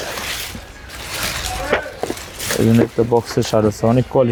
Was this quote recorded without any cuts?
yes; 0 cuts

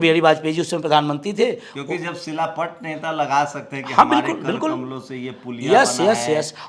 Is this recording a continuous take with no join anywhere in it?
yes; 0 cuts

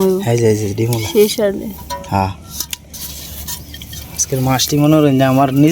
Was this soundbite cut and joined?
no; 0 cuts

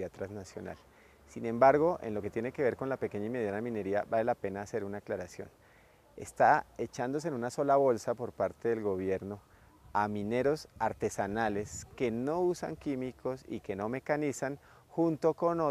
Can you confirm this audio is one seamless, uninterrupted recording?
no; 1 cut; at 7.5 s

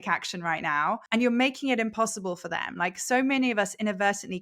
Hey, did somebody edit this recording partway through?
yes; 1 cut; at 1.0 s

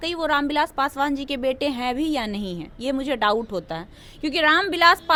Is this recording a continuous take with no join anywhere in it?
yes; 0 cuts

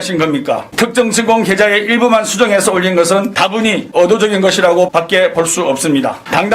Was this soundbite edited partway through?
yes; 1 cut; at 4.9 s

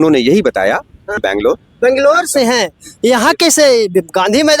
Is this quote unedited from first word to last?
no; 1 cut; at 1.2 s

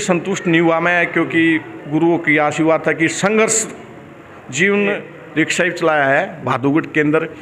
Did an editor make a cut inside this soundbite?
yes; 1 cut; at 5.1 s

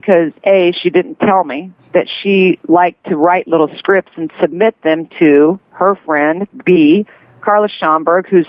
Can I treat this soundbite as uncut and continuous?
yes; 0 cuts

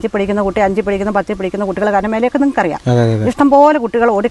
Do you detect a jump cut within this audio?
no; 0 cuts

